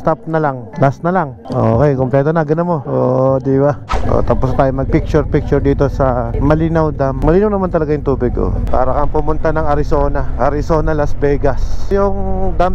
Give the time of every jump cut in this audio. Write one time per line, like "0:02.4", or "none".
none